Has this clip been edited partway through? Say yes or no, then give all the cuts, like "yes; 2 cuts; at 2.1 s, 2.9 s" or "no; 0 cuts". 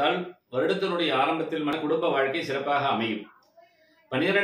yes; 1 cut; at 1.8 s